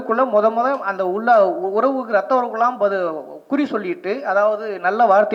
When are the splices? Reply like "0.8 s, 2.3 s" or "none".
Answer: none